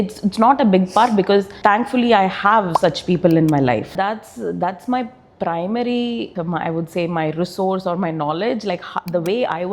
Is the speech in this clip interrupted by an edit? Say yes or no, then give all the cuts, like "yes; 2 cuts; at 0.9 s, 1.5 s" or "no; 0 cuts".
yes; 1 cut; at 3.9 s